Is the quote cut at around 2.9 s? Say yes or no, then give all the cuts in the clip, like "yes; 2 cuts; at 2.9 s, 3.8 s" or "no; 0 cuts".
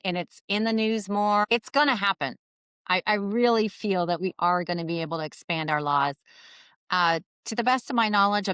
no; 1 cut; at 1.5 s